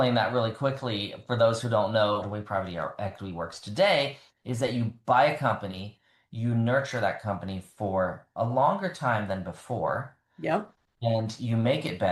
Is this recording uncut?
no; 1 cut; at 2.2 s

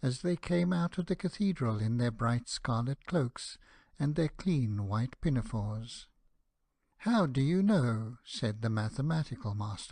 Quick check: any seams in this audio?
no; 0 cuts

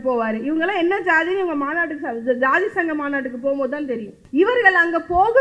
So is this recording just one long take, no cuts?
no; 1 cut; at 4.1 s

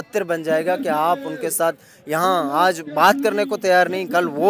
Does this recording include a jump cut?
no; 0 cuts

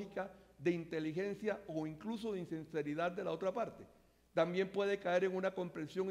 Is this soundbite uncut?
yes; 0 cuts

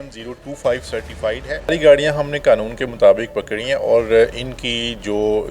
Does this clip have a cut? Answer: yes; 1 cut; at 1.8 s

